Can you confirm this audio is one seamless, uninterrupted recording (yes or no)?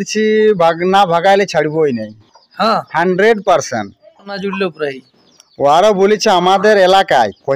no